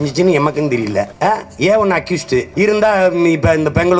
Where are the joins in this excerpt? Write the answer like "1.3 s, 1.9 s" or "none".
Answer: 2.5 s

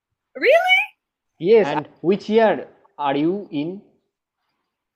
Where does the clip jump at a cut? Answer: 1.7 s

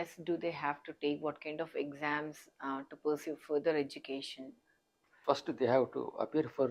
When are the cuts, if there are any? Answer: 5.2 s

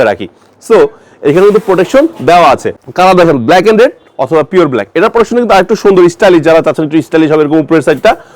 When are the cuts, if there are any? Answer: 2.8 s

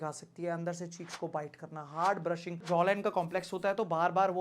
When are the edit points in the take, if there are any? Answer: 2.7 s

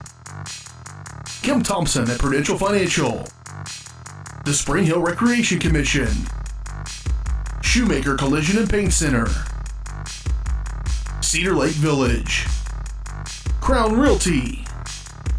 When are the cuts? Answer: 0.9 s

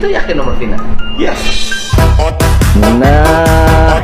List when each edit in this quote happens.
none

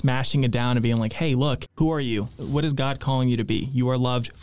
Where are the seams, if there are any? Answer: 1.7 s, 2.4 s

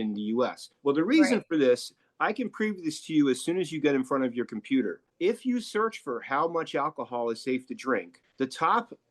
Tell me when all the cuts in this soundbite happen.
none

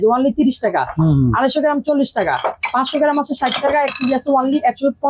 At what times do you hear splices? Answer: none

